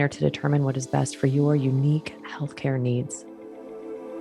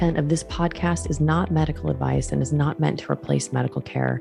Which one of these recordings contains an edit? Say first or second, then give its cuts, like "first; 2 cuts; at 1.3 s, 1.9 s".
first; 1 cut; at 3.2 s